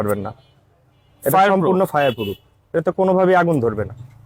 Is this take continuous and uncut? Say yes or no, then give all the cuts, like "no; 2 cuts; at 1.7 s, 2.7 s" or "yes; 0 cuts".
yes; 0 cuts